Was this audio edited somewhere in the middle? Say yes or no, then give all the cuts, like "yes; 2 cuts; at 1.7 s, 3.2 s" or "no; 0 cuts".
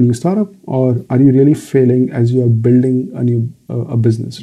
no; 0 cuts